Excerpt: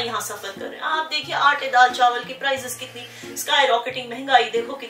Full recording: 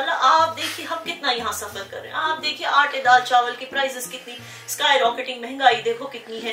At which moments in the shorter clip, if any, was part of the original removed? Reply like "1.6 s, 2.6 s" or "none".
none